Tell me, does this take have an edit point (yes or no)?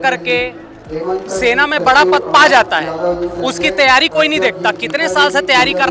no